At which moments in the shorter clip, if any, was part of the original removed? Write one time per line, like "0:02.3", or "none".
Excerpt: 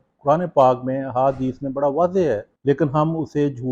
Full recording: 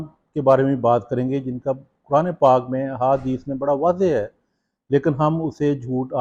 0:02.5